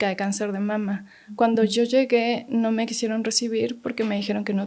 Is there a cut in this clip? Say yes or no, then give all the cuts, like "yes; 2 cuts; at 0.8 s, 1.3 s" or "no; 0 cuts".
no; 0 cuts